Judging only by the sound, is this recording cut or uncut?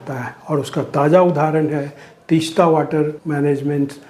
cut